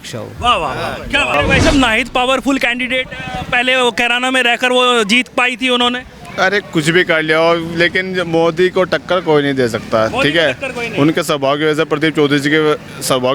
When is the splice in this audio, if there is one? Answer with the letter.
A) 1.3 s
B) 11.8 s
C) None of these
A